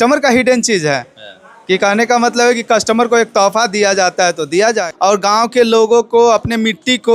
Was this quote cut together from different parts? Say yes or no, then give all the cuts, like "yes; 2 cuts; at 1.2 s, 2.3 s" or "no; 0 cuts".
yes; 1 cut; at 4.9 s